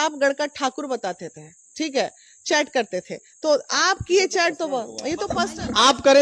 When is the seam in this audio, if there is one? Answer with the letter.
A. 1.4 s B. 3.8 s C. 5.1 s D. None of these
D